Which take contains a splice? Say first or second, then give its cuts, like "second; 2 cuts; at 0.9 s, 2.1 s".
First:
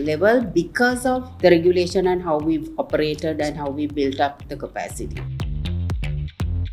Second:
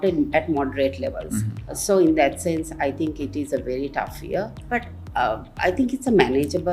first; 1 cut; at 5.2 s